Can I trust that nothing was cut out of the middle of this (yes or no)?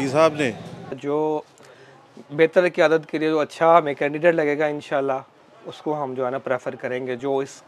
no